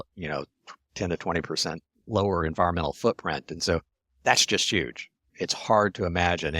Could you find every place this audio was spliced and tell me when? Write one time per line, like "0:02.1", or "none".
0:05.3